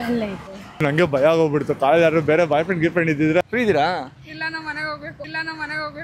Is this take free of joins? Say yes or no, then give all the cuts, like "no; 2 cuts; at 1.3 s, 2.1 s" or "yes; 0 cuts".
no; 1 cut; at 3.5 s